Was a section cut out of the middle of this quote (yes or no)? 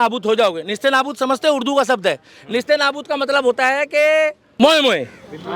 yes